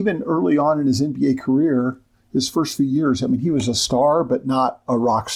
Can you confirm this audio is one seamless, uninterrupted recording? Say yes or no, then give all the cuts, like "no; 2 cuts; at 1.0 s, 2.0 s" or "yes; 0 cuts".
yes; 0 cuts